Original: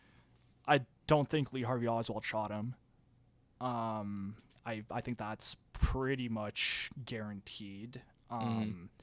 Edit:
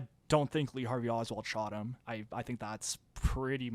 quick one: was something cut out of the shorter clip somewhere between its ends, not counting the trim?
yes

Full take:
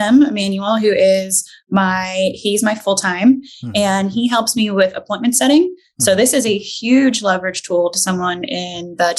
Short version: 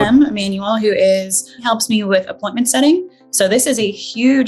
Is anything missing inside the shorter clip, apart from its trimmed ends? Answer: yes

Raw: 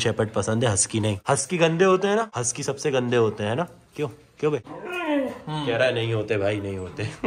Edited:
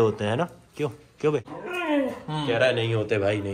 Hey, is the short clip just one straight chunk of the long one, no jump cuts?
yes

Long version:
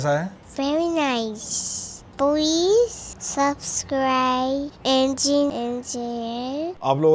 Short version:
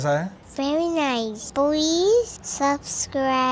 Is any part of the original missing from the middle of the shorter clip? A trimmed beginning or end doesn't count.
yes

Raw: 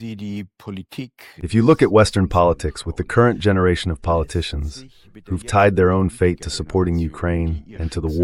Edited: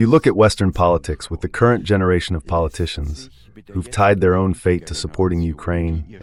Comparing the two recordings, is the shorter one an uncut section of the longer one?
yes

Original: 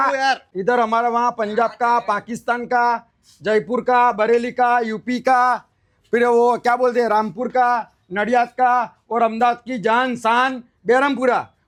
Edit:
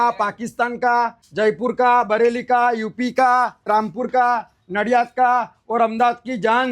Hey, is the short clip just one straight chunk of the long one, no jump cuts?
no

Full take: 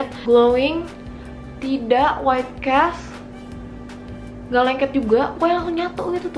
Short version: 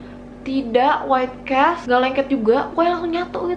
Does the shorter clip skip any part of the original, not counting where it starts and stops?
yes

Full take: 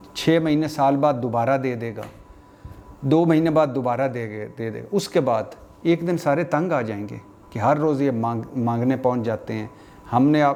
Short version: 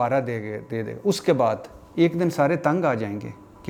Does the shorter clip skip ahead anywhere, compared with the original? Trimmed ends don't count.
no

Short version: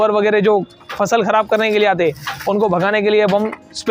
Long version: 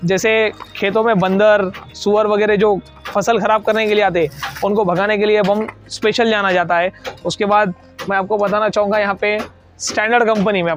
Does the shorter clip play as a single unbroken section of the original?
yes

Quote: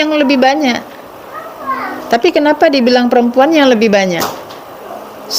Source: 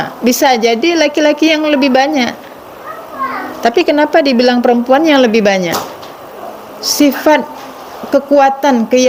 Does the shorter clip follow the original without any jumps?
yes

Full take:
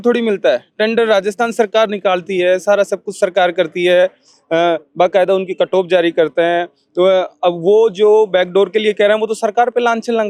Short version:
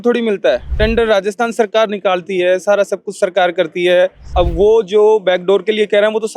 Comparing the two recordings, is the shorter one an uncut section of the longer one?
no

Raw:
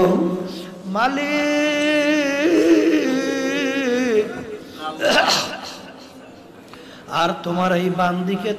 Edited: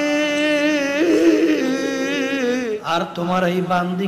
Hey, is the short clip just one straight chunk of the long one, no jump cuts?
no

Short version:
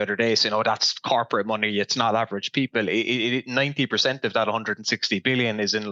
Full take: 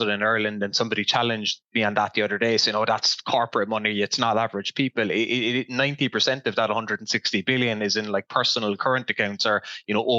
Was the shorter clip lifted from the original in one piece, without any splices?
yes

